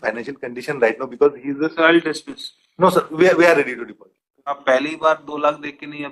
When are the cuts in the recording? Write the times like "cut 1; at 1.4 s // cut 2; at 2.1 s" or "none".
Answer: cut 1; at 4.6 s